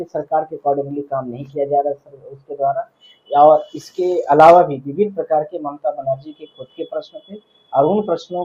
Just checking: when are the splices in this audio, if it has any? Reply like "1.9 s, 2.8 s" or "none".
none